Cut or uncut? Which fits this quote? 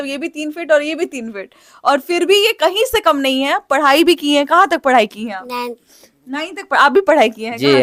uncut